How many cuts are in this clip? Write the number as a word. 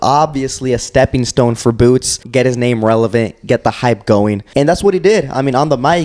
two